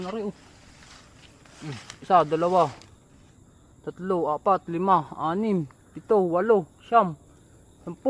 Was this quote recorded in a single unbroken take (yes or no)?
yes